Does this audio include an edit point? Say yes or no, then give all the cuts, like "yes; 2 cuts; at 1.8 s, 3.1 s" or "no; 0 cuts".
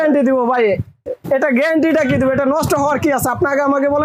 no; 0 cuts